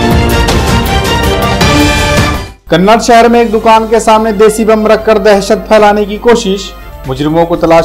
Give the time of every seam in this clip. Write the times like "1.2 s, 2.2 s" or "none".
2.3 s